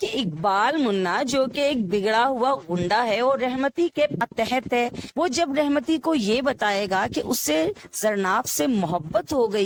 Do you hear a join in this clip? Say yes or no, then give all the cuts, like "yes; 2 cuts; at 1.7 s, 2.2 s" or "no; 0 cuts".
no; 0 cuts